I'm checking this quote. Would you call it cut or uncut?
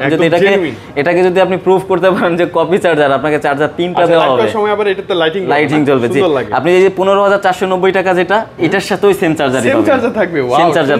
uncut